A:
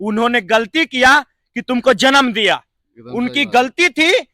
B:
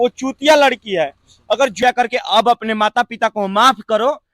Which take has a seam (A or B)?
B